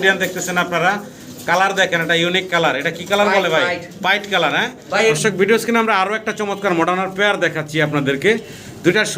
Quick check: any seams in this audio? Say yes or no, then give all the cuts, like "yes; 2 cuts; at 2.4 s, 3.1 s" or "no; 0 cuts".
yes; 1 cut; at 5.1 s